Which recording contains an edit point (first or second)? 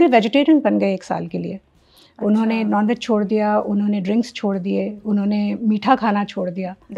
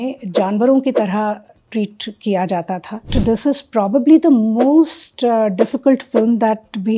second